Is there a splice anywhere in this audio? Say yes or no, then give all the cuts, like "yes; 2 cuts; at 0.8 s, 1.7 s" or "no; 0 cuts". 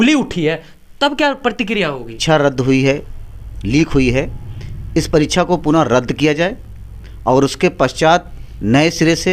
yes; 1 cut; at 2.2 s